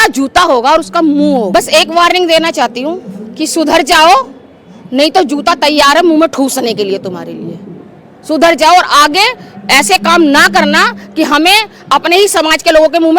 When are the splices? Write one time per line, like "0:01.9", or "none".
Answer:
0:01.5